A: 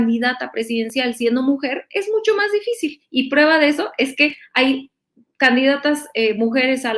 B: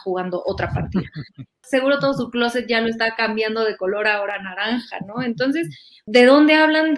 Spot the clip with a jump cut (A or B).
B